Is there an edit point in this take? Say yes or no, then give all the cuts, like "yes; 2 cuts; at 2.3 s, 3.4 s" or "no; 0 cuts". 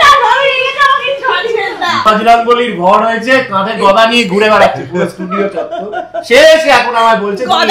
yes; 1 cut; at 2.0 s